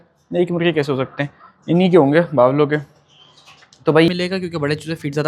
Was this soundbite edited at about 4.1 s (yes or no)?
yes